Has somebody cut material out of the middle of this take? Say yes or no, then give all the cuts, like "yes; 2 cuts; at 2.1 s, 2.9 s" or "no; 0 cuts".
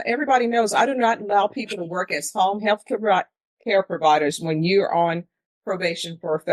no; 0 cuts